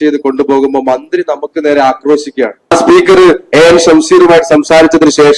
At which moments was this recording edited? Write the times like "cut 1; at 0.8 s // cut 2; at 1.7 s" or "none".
cut 1; at 2.7 s